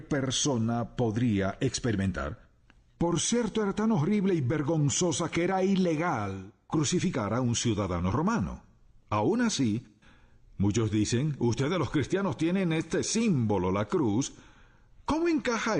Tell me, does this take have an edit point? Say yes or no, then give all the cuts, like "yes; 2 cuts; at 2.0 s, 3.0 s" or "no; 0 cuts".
no; 0 cuts